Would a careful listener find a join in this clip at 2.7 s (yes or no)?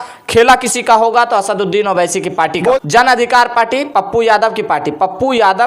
yes